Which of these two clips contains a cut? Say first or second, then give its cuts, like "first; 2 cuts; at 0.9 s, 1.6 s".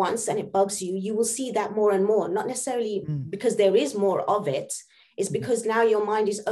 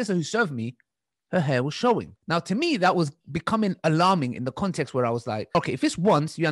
second; 2 cuts; at 2.1 s, 5.6 s